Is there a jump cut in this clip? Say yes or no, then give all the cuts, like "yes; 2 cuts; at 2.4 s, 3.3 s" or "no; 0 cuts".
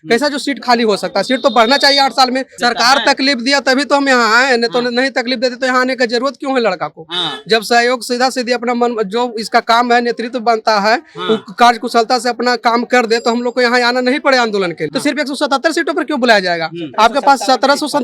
yes; 2 cuts; at 2.5 s, 14.9 s